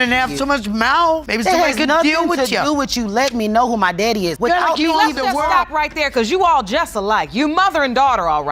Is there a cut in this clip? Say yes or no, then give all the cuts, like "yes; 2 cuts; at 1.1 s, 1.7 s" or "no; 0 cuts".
no; 0 cuts